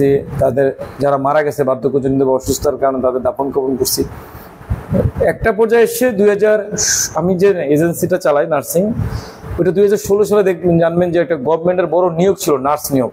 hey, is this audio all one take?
yes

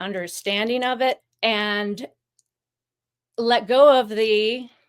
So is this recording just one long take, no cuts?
no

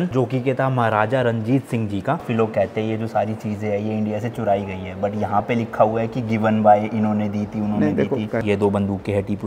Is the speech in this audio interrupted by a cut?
yes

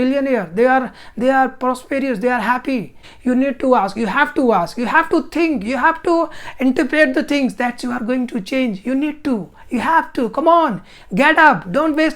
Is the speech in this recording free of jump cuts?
no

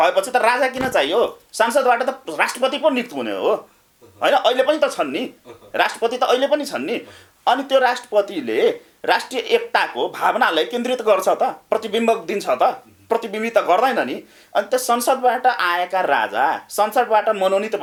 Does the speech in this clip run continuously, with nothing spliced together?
yes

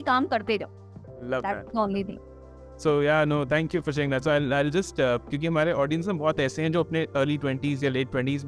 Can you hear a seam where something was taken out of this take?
no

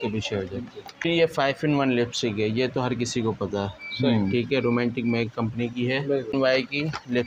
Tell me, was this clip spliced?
yes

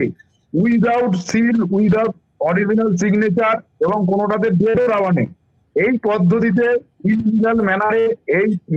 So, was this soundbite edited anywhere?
no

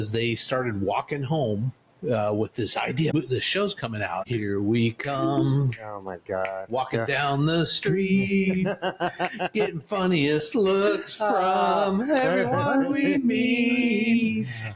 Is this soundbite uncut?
no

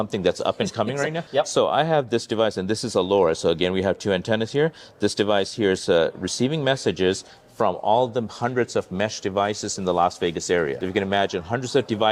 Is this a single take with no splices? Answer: no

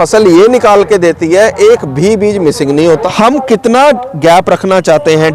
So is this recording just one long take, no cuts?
no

